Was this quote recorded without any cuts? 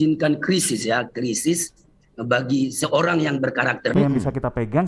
no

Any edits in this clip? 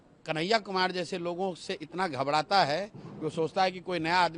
no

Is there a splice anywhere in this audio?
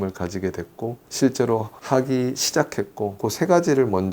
yes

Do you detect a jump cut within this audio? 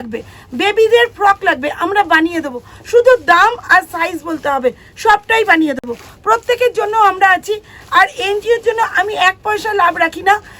no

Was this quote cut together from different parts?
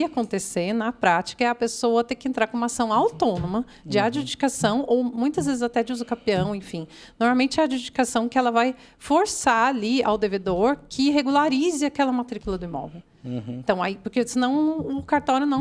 no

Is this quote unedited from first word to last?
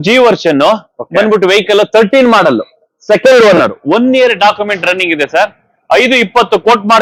yes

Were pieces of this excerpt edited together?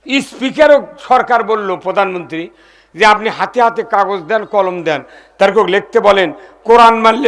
no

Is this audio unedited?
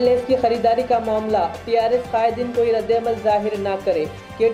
yes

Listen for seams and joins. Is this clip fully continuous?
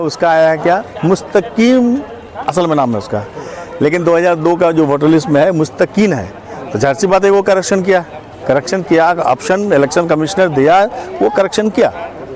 yes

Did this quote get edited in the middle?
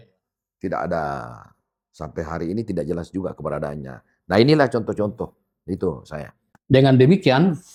no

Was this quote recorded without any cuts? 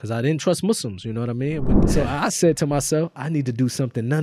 no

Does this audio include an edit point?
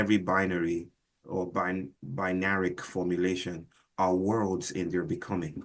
yes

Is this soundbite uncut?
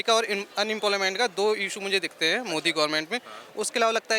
yes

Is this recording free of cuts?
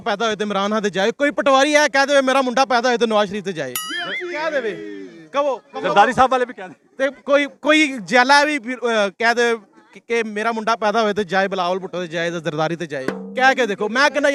yes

